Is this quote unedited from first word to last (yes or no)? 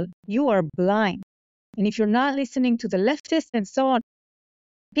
no